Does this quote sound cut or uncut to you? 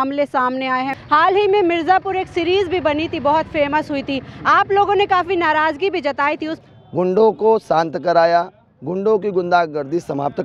cut